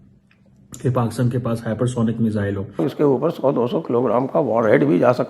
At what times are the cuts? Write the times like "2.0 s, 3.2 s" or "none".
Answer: 2.8 s